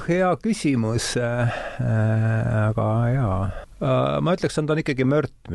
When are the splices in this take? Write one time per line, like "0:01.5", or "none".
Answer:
0:03.6